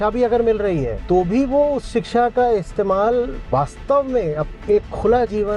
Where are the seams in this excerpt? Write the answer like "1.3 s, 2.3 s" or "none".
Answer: 1.0 s, 3.4 s